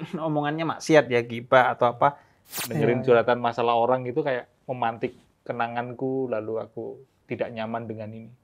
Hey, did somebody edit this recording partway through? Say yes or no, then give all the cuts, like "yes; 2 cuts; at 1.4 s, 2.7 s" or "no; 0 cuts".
yes; 1 cut; at 2.6 s